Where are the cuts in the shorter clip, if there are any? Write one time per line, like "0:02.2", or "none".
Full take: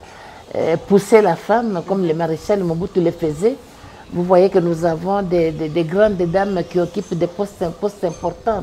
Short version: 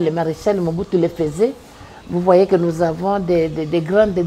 none